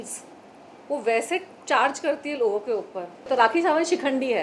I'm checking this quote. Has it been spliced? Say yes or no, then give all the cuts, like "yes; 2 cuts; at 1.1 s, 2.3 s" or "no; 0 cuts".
yes; 1 cut; at 3.3 s